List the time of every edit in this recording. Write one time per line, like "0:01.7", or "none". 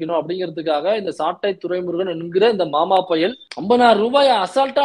0:03.5